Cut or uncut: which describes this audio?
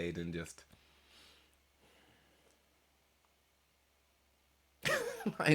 uncut